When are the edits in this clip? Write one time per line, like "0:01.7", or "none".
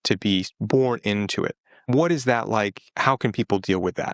none